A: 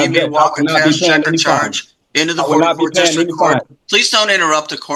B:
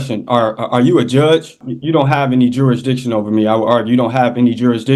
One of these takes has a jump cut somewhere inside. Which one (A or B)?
B